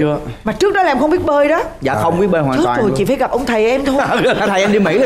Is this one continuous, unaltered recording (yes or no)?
yes